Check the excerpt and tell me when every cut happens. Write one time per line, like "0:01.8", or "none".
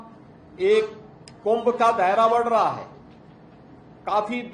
none